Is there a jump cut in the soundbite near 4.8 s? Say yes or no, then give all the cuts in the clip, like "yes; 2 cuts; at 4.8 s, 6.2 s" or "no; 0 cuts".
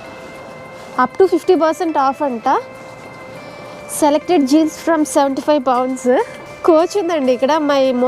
no; 1 cut; at 6.4 s